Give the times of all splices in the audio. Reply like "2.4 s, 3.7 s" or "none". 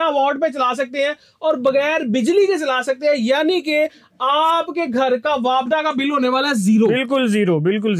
none